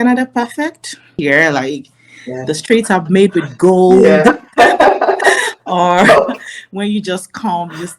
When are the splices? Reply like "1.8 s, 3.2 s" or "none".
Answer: 1.1 s